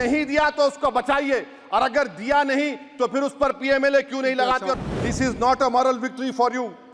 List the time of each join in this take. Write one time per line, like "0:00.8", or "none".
0:04.9